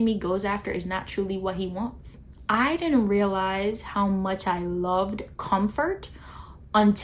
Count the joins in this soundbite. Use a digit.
1